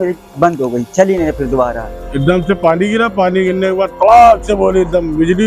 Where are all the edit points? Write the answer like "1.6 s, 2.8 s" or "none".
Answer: 1.9 s